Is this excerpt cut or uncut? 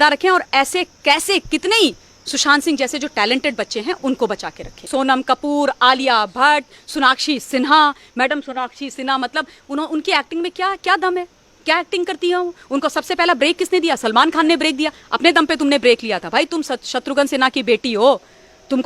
cut